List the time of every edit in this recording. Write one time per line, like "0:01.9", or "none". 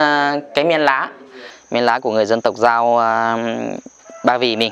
0:01.5